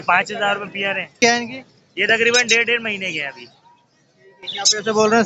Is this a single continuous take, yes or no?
no